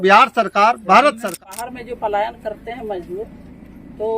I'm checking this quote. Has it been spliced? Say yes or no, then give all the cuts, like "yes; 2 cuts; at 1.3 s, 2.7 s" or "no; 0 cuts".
yes; 1 cut; at 1.4 s